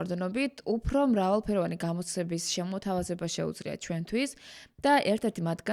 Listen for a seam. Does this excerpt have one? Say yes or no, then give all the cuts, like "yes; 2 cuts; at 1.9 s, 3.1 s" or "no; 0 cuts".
no; 0 cuts